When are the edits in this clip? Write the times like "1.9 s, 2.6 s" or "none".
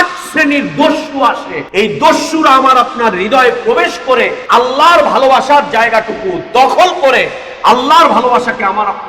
1.5 s, 4.4 s

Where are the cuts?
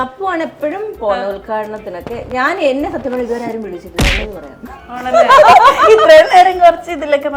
none

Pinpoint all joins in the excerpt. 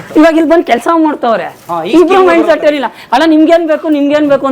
none

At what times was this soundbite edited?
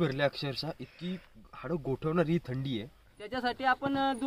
3.2 s

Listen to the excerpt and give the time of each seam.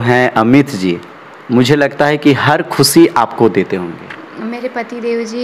4.3 s

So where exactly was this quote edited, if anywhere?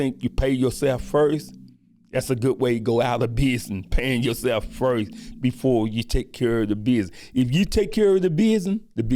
none

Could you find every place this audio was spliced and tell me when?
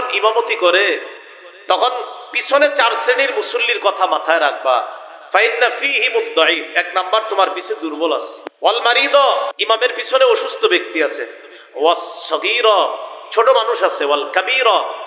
8.4 s, 9.5 s

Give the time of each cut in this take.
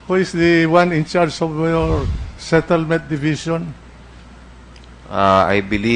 1.2 s

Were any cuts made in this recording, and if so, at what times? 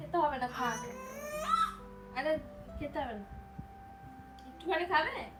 none

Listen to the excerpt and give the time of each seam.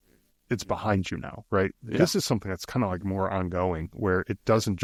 none

